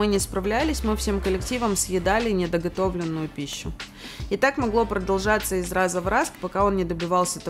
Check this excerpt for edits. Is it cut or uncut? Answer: cut